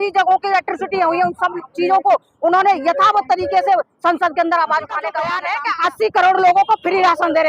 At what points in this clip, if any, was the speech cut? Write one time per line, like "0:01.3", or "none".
0:05.4